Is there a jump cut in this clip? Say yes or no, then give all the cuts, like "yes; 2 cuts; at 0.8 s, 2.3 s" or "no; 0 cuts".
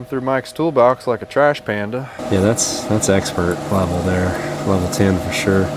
yes; 1 cut; at 2.1 s